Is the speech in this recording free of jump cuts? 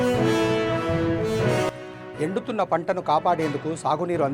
no; 1 cut; at 1.9 s

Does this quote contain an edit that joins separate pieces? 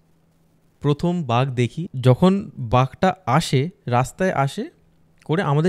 yes; 1 cut; at 1.9 s

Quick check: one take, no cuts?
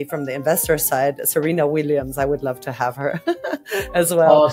yes; 0 cuts

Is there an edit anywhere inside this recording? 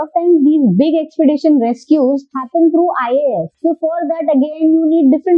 yes; 2 cuts; at 2.4 s, 3.5 s

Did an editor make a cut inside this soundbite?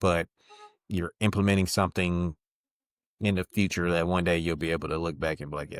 no; 0 cuts

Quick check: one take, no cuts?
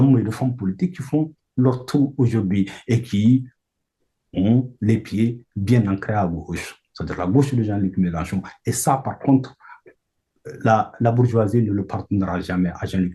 yes; 0 cuts

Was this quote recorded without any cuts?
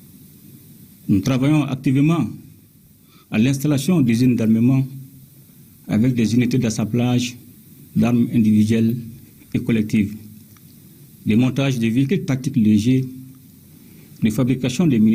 yes; 0 cuts

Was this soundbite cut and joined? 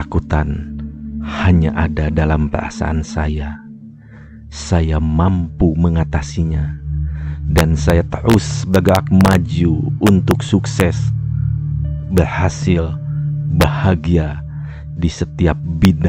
no; 0 cuts

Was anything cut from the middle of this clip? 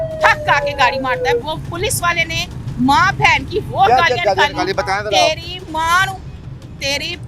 yes; 1 cut; at 1.4 s

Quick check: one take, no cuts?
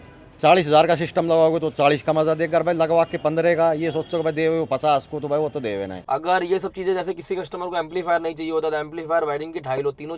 no; 1 cut; at 5.9 s

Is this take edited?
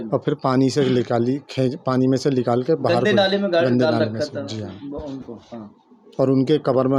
no; 0 cuts

